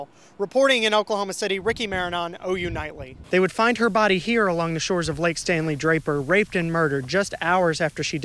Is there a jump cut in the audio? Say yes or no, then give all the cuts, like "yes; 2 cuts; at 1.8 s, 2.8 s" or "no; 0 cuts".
yes; 1 cut; at 3.2 s